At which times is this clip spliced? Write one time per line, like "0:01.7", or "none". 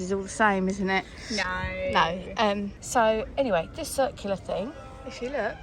none